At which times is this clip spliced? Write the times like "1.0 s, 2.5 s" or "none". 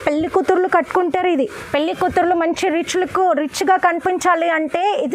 1.6 s